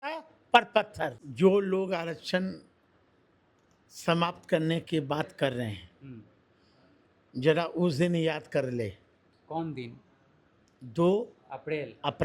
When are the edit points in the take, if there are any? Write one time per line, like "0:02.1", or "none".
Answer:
0:01.2